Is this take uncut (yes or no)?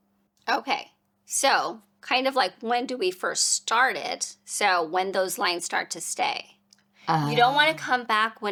yes